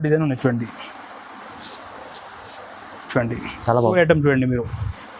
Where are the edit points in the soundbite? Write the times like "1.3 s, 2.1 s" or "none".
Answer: 3.9 s